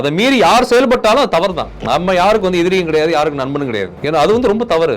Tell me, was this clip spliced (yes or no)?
yes